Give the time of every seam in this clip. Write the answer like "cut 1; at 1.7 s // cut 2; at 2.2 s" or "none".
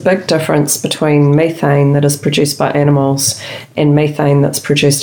none